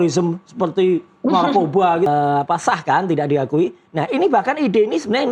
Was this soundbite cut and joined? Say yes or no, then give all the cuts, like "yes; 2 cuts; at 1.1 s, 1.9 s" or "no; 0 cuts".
yes; 1 cut; at 2.1 s